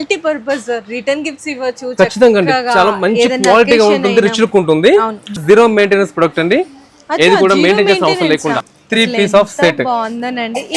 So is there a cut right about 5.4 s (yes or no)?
yes